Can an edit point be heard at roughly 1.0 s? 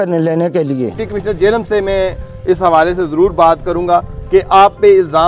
yes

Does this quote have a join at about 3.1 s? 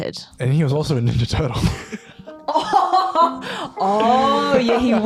no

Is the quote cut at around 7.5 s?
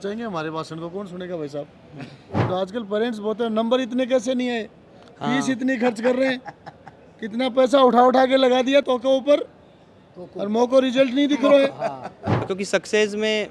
no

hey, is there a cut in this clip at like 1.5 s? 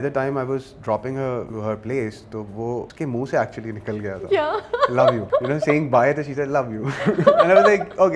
yes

